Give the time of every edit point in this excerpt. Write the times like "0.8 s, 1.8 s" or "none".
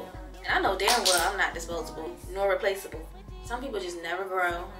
none